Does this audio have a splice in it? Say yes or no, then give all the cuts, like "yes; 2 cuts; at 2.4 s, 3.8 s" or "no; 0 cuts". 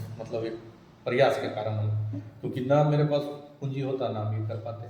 no; 0 cuts